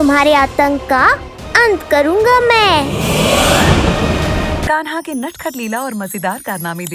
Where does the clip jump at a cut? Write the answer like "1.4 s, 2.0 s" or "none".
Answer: 4.7 s